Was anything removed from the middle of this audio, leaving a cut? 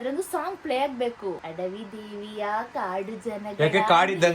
yes; 1 cut; at 1.5 s

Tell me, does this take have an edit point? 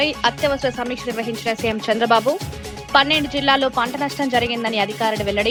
no; 0 cuts

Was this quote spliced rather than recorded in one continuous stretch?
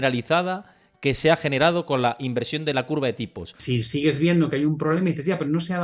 yes; 1 cut; at 3.6 s

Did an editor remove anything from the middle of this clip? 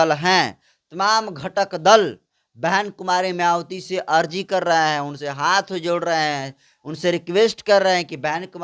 no; 0 cuts

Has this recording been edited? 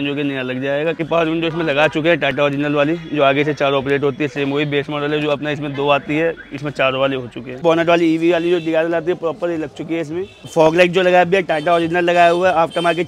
yes; 3 cuts; at 1.0 s, 7.6 s, 10.5 s

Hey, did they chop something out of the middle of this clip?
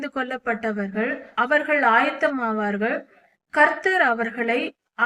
yes; 1 cut; at 1.3 s

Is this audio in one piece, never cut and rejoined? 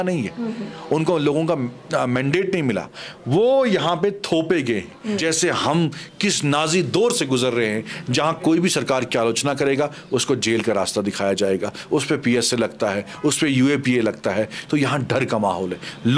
no; 1 cut; at 5.2 s

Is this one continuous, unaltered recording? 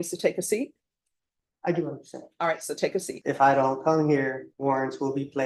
no; 2 cuts; at 3.1 s, 4.5 s

